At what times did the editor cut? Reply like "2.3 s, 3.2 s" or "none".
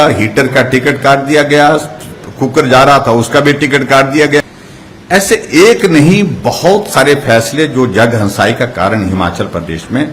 4.4 s